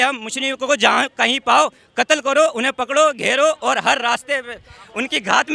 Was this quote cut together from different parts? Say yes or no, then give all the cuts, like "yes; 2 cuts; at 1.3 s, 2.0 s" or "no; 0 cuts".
no; 0 cuts